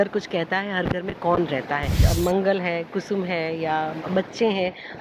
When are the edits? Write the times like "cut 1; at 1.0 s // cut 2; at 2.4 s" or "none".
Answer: cut 1; at 2.1 s